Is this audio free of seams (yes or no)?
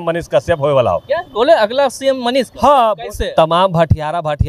no